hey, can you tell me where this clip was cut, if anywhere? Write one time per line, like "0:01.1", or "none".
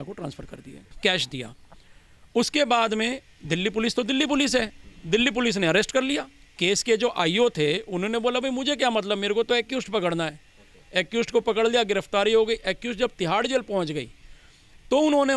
none